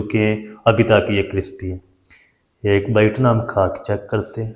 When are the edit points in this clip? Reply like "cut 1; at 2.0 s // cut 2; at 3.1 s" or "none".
none